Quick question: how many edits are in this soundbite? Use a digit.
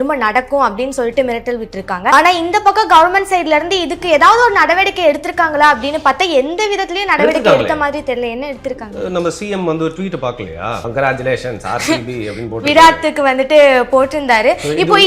2